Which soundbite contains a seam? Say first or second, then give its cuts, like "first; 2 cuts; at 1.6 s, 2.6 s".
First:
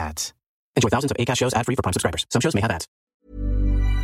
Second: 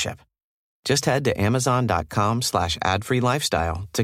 first; 1 cut; at 2.9 s